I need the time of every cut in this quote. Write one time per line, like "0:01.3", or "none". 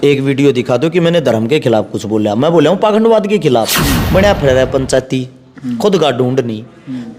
0:03.8